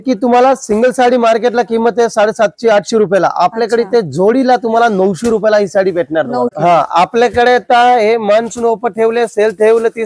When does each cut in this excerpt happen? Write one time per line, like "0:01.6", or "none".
0:06.5